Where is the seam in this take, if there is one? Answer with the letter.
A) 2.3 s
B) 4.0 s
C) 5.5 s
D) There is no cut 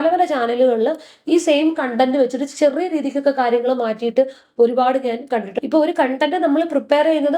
C